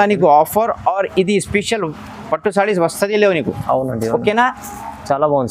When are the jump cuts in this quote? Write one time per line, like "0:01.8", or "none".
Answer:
none